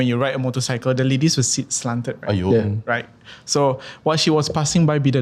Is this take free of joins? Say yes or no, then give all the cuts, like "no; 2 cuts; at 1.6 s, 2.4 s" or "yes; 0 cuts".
yes; 0 cuts